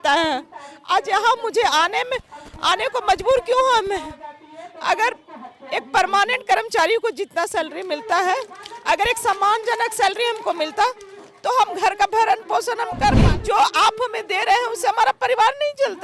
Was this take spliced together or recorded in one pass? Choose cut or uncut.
cut